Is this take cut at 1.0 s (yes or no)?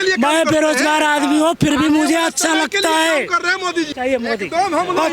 no